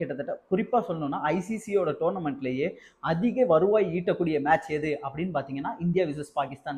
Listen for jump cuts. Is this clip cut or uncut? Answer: uncut